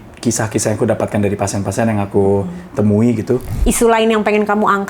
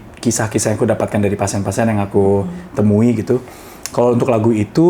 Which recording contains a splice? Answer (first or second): first